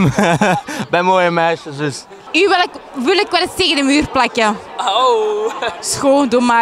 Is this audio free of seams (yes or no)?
no